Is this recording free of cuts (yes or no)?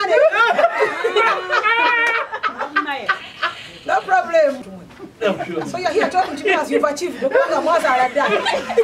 no